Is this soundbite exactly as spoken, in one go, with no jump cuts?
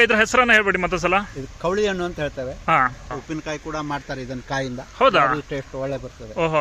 no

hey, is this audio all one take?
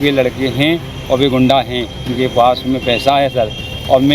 yes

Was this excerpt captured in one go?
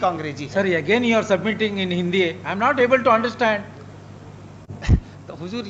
yes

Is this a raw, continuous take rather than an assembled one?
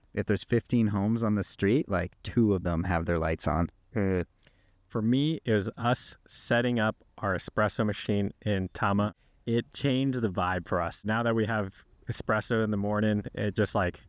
no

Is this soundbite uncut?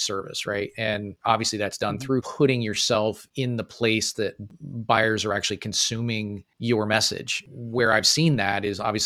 no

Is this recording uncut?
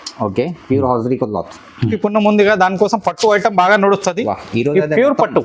no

